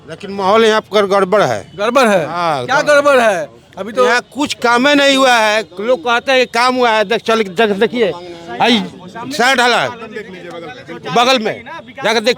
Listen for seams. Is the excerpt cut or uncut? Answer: uncut